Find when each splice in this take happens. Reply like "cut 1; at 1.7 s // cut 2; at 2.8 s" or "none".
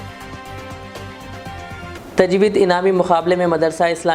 none